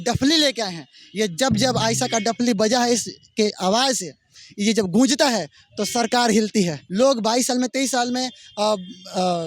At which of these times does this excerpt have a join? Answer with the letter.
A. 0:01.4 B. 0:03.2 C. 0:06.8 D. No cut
C